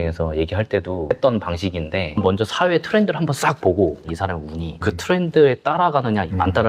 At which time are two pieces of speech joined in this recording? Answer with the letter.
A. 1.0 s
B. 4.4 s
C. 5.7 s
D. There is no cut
D